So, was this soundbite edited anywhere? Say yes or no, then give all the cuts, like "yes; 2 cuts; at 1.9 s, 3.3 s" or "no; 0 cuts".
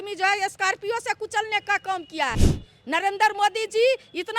yes; 1 cut; at 2.5 s